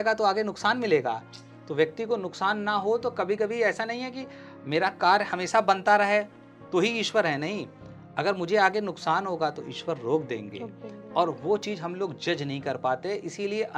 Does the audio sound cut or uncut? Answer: uncut